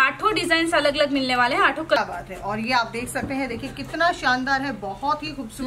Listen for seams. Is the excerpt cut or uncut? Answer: cut